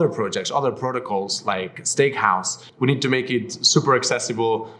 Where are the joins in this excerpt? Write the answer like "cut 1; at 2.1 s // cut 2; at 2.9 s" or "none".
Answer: cut 1; at 2.6 s